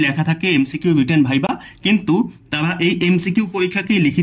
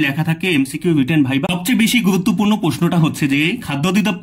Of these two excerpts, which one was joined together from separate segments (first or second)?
second